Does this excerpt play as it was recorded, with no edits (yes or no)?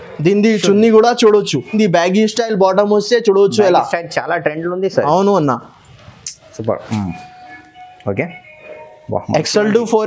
no